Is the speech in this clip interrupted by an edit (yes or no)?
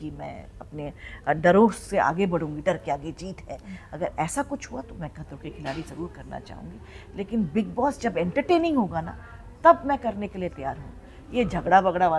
no